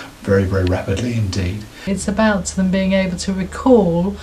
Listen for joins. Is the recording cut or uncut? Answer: cut